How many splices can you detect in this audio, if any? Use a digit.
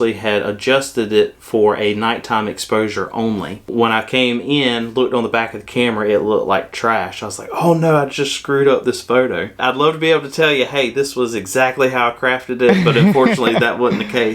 2